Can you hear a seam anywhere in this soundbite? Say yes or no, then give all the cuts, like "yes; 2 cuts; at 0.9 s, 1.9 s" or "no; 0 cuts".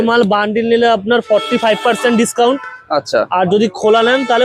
no; 0 cuts